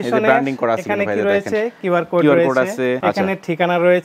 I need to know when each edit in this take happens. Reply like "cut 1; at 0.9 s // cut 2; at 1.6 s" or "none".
cut 1; at 3.0 s